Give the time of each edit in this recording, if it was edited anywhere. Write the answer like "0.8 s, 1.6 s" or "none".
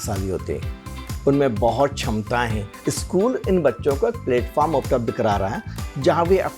2.7 s

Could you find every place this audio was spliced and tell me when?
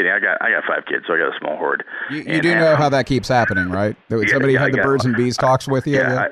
4.0 s

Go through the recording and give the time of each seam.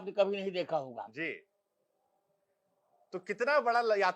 none

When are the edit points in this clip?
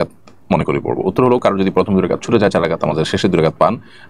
none

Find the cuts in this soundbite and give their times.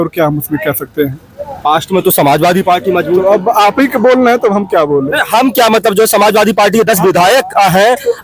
none

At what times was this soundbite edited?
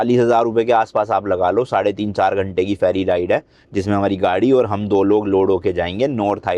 none

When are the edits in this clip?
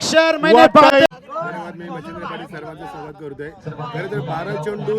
1.1 s

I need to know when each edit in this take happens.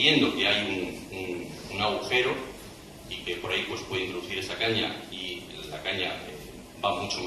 3.2 s

